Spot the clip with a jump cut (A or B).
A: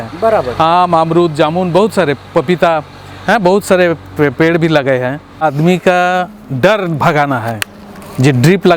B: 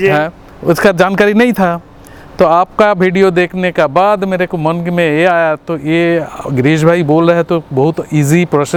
A